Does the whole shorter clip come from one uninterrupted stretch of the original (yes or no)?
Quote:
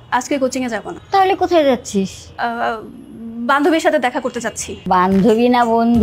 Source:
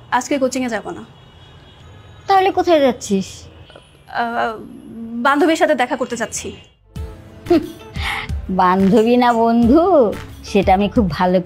no